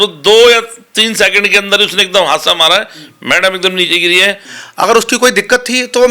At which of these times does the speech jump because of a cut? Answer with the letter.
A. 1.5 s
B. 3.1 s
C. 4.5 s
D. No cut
C